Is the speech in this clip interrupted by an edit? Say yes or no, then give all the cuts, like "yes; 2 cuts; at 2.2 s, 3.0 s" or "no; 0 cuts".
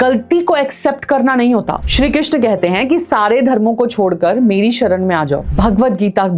yes; 2 cuts; at 1.8 s, 5.5 s